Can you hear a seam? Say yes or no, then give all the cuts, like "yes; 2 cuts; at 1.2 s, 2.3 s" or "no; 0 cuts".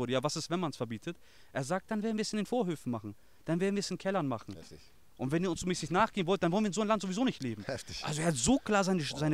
no; 0 cuts